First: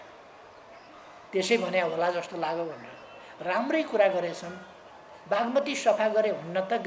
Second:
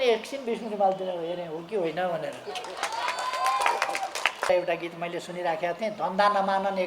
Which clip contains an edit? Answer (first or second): second